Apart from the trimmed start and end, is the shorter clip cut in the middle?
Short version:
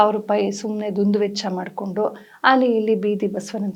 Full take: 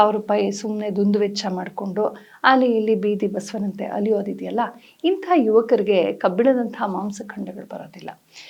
no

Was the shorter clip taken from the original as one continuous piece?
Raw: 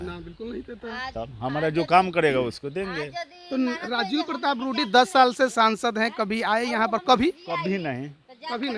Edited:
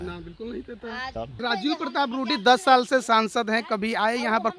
no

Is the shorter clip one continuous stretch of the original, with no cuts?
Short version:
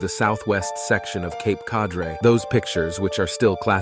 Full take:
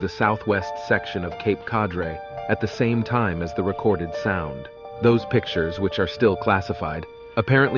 no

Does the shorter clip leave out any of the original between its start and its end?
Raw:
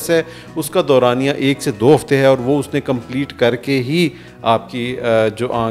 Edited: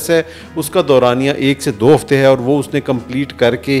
no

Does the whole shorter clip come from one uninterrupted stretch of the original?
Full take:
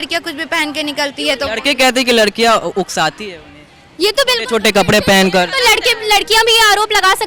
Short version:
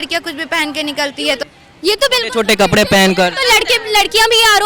no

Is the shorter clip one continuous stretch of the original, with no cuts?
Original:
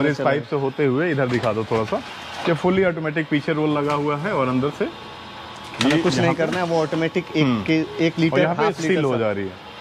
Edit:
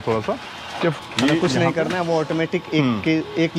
no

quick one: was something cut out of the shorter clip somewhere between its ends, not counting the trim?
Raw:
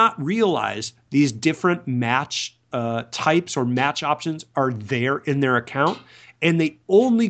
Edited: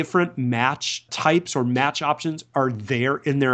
yes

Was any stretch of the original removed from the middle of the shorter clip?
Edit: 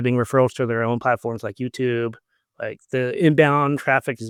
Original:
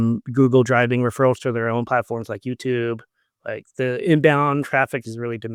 no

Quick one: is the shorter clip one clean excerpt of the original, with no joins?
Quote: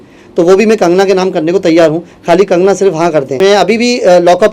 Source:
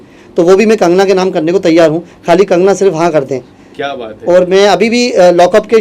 no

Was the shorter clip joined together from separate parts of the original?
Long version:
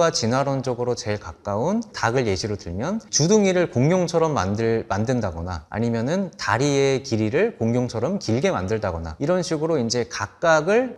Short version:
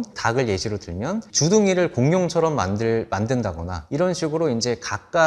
yes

